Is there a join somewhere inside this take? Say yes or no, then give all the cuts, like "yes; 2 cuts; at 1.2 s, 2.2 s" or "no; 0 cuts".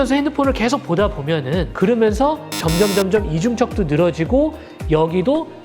yes; 1 cut; at 1.7 s